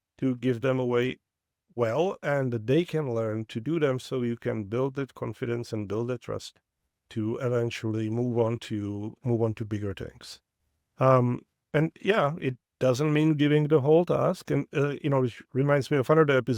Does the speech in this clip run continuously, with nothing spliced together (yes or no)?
yes